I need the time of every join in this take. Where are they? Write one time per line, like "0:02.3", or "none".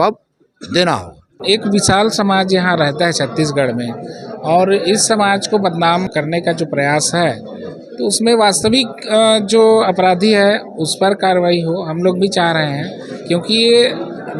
0:01.4
0:06.1